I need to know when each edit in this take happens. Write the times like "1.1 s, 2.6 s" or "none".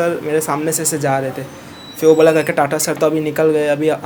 none